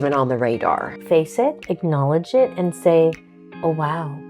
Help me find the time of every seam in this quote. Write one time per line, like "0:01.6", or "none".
0:00.9